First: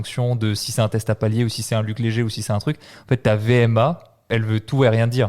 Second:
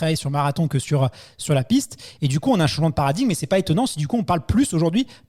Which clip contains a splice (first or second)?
first